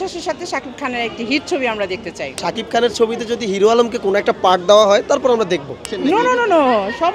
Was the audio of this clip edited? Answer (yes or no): yes